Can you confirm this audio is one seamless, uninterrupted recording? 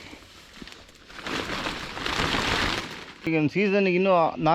no; 1 cut; at 3.3 s

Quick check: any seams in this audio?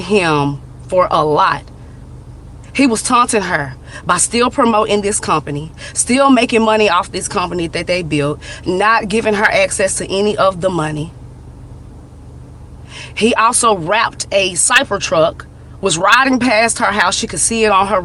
no; 0 cuts

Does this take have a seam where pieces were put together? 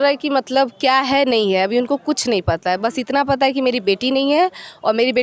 no; 0 cuts

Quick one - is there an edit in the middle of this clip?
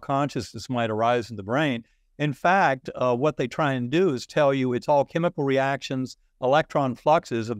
no; 0 cuts

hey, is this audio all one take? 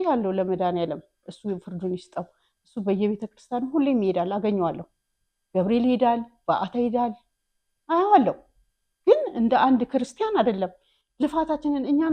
yes; 0 cuts

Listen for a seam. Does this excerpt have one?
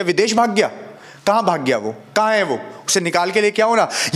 no; 0 cuts

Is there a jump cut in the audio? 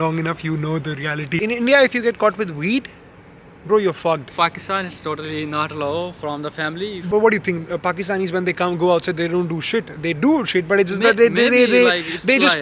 yes; 3 cuts; at 1.4 s, 4.3 s, 6.9 s

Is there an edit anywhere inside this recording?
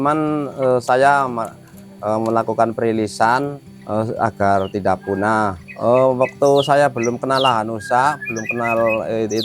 yes; 1 cut; at 5.6 s

